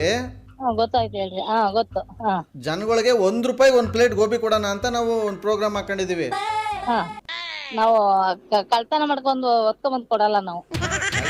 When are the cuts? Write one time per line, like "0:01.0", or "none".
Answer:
0:07.2